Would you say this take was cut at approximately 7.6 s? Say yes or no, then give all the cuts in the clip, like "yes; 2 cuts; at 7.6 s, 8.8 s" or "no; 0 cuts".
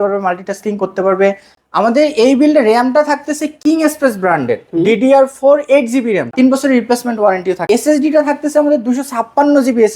yes; 3 cuts; at 1.5 s, 6.3 s, 7.6 s